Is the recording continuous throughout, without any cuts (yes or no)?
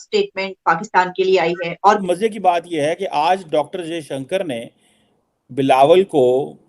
no